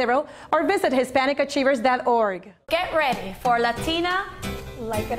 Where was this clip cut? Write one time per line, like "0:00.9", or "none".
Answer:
0:02.5